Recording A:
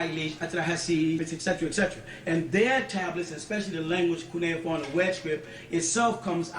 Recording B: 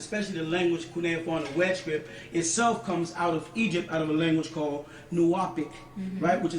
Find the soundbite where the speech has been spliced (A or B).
A